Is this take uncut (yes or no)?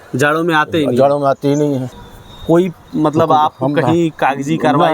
no